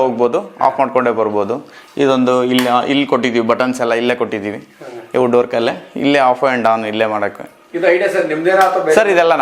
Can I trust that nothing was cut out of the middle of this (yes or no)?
yes